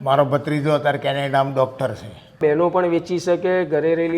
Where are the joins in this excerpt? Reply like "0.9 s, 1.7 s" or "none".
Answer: 2.4 s